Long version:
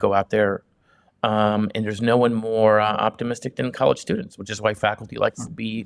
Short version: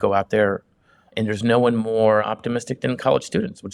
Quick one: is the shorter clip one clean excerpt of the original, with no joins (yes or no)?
no